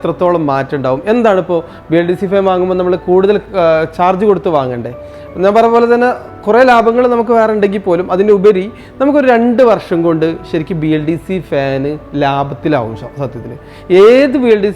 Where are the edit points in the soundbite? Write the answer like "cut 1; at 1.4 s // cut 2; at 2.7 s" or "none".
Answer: none